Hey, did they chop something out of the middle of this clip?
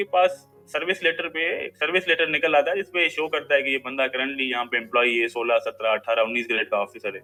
no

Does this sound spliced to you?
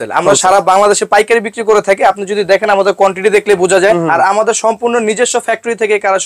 yes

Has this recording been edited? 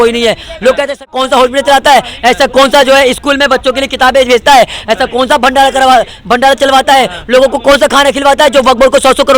yes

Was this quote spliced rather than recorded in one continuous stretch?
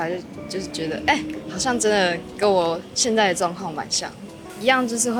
no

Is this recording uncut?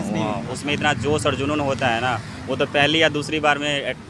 yes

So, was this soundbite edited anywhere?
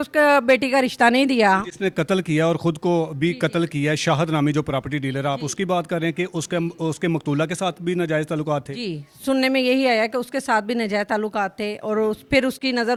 no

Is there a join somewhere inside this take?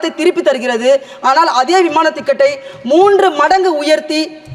no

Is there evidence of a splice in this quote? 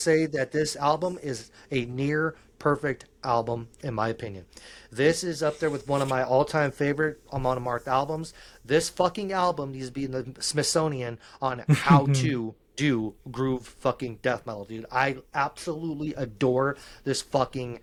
no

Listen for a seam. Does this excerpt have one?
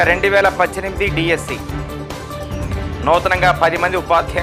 no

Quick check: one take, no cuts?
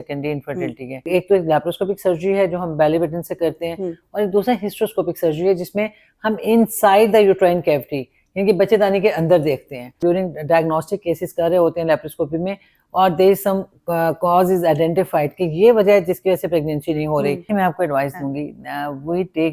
no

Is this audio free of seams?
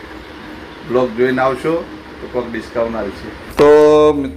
no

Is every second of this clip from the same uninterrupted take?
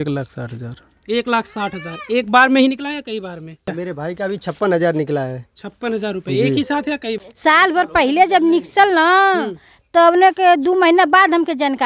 no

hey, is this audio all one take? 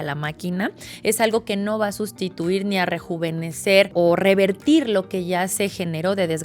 no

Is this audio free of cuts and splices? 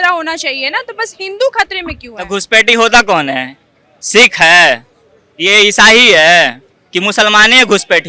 yes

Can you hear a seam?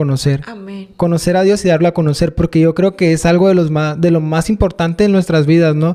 no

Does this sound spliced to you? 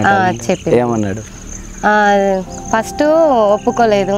no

